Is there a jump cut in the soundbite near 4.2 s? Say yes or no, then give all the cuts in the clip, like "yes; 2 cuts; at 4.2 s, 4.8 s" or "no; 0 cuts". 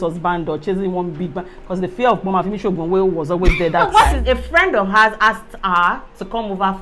yes; 1 cut; at 4.2 s